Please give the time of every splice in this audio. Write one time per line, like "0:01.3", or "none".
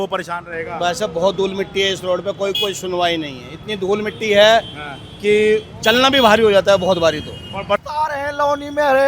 0:07.8